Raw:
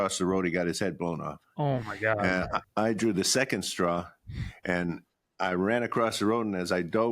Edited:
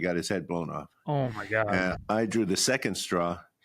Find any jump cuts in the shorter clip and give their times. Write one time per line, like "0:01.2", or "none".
0:02.0